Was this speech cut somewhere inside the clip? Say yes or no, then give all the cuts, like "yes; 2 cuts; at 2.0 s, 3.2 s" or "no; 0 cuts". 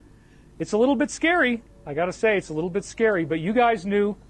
yes; 1 cut; at 3.1 s